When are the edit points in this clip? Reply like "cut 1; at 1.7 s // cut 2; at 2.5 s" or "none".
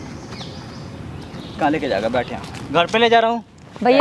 cut 1; at 1.4 s